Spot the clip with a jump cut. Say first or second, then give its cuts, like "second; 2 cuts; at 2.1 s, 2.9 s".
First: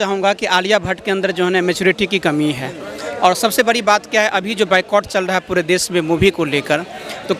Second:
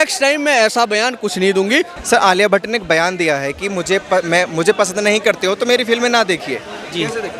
second; 1 cut; at 1.9 s